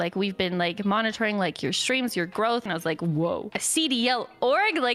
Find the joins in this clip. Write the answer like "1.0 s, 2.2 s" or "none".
2.6 s, 3.6 s